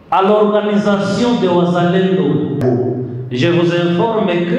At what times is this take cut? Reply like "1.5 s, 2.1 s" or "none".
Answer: 2.6 s